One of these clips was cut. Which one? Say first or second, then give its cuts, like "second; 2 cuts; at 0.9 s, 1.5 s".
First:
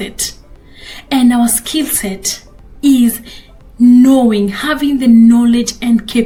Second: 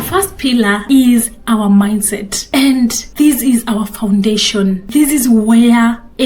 second; 4 cuts; at 0.8 s, 2.3 s, 3.0 s, 4.8 s